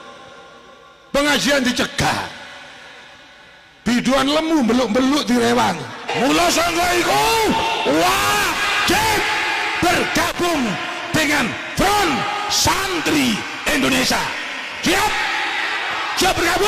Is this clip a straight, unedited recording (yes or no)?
no